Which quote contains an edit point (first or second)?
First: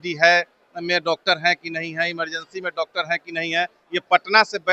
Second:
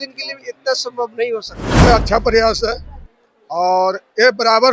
second